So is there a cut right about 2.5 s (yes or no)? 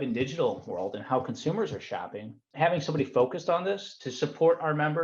yes